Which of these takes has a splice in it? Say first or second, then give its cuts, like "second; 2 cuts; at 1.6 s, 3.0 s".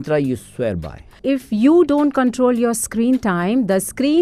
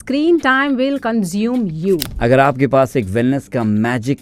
second; 1 cut; at 2.1 s